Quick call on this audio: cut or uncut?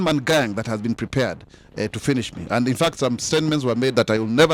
uncut